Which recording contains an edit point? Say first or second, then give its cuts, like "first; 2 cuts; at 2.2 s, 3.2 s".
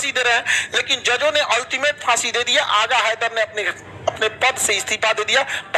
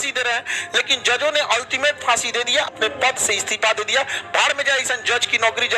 second; 1 cut; at 2.7 s